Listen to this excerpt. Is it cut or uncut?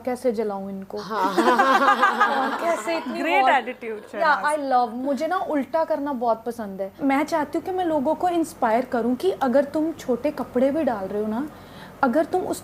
cut